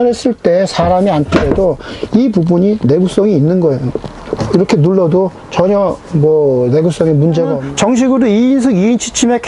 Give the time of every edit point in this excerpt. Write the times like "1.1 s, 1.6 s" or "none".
7.6 s